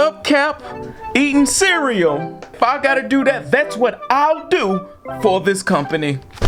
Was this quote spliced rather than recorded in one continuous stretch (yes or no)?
no